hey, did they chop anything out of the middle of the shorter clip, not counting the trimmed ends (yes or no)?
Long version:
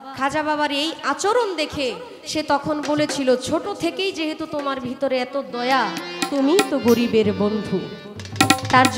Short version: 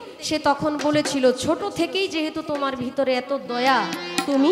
no